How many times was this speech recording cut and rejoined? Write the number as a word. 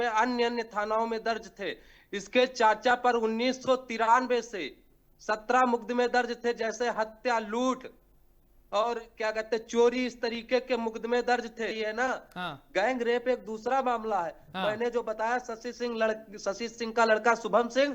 one